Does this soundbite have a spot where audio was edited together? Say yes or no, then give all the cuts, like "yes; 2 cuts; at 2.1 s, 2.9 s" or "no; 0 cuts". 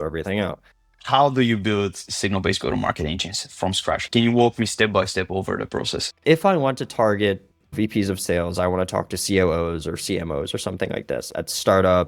yes; 3 cuts; at 0.9 s, 6.0 s, 7.7 s